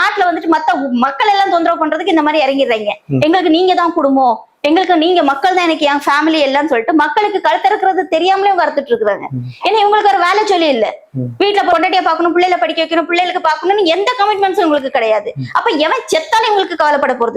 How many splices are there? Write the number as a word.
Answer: zero